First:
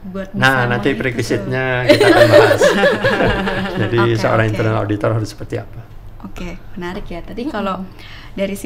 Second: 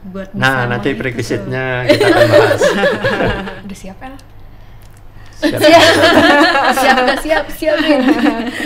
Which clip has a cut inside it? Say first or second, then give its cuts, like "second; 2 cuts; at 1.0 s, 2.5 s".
second; 1 cut; at 3.5 s